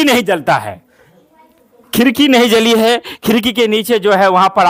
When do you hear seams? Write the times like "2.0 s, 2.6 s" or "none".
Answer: none